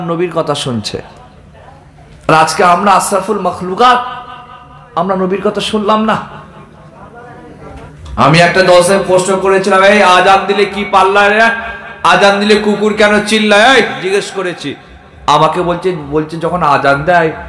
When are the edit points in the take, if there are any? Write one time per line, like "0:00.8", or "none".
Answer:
0:07.9